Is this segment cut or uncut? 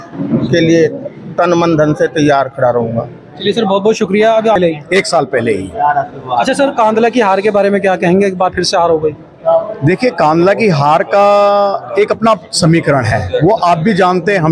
cut